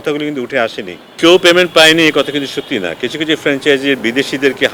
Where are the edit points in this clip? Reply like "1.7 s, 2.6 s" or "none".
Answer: 1.0 s